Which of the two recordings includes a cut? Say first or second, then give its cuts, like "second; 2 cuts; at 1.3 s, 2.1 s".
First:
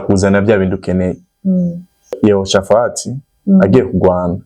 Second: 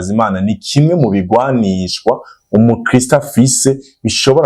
first; 1 cut; at 2.2 s